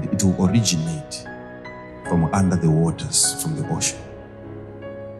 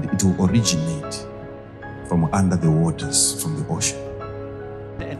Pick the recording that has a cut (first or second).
first